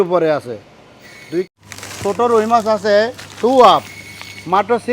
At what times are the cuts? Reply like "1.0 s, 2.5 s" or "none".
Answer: 1.5 s